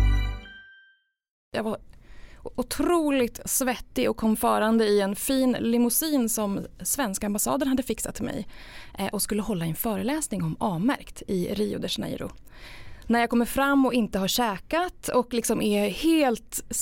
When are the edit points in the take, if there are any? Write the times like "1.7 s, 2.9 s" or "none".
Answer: 1.5 s